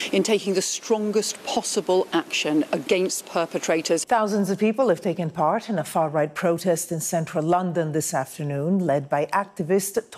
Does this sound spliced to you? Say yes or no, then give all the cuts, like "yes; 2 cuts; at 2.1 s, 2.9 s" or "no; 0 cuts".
yes; 1 cut; at 4.0 s